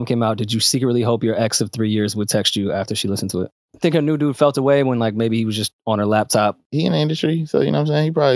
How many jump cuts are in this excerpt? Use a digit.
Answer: 2